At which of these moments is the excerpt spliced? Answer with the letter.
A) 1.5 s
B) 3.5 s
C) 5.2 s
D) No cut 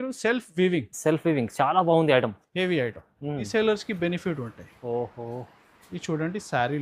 B